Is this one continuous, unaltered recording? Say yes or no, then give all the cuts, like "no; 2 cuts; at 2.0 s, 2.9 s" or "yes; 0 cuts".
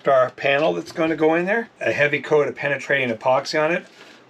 no; 1 cut; at 1.7 s